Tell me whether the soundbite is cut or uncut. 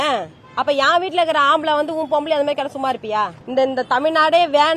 cut